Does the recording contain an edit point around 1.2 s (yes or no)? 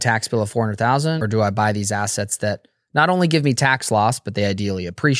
yes